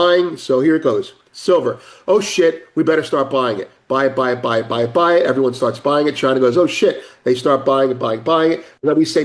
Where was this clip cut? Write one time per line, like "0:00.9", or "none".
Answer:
none